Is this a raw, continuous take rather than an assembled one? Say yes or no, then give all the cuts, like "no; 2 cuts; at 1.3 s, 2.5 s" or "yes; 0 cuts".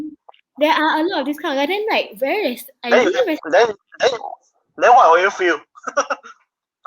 yes; 0 cuts